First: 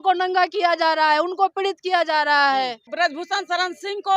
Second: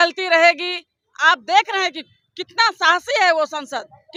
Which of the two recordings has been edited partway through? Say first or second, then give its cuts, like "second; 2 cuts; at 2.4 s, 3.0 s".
first; 1 cut; at 2.9 s